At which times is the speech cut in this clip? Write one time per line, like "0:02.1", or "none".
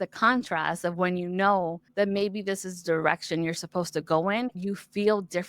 0:01.8
0:04.6